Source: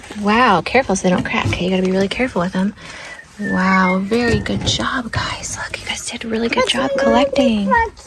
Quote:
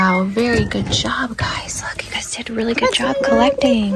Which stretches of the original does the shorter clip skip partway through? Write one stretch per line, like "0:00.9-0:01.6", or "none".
none